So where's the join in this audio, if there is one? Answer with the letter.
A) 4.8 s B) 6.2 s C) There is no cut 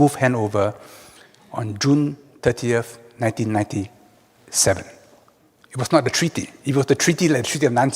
B